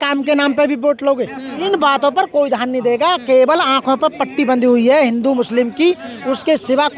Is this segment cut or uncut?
cut